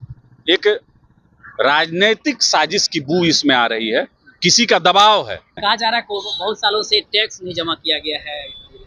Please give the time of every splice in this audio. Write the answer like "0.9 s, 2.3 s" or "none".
5.5 s